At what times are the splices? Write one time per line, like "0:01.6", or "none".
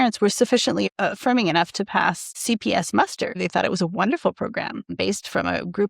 0:00.9
0:02.4
0:03.4
0:04.9